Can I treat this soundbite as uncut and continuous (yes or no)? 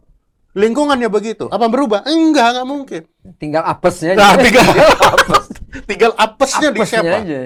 yes